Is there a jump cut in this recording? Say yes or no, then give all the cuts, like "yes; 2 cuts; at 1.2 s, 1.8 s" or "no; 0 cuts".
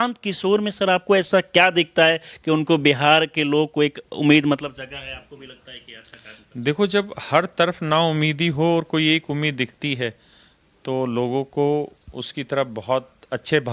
no; 0 cuts